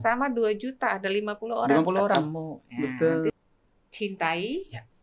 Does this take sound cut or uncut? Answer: cut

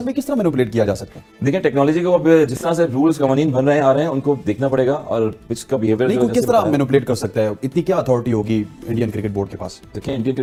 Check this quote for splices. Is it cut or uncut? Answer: uncut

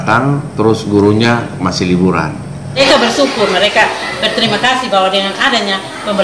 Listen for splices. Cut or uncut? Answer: cut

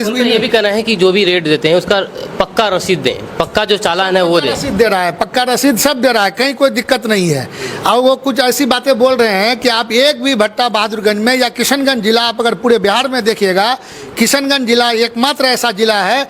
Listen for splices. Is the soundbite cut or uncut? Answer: uncut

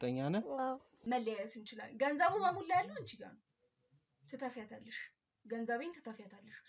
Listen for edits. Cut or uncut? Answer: cut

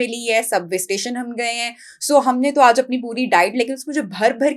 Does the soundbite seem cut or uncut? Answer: uncut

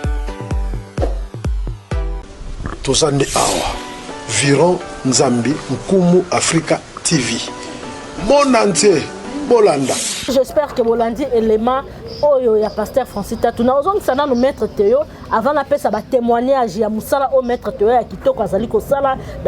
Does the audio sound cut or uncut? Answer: uncut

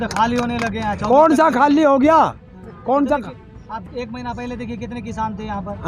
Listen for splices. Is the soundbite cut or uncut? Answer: uncut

